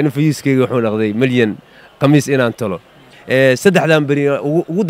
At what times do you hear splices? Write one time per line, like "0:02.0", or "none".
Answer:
0:02.8